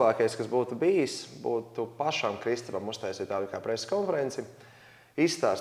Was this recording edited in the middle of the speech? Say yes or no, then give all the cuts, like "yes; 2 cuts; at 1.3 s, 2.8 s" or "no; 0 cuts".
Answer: no; 0 cuts